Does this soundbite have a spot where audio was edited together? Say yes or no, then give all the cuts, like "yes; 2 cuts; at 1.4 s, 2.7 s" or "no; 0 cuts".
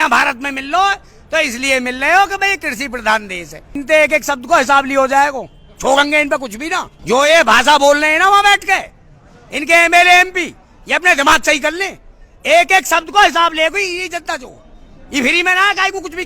yes; 2 cuts; at 3.8 s, 6.9 s